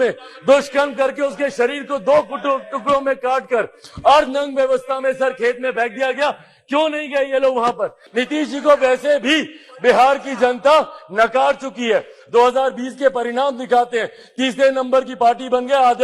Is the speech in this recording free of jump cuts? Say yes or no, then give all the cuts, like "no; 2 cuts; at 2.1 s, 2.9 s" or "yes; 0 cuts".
no; 1 cut; at 8.0 s